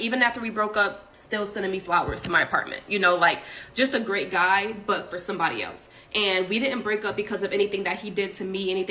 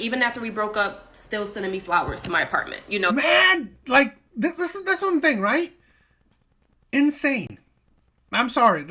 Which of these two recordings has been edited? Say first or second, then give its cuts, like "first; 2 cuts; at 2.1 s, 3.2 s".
first; 1 cut; at 3.1 s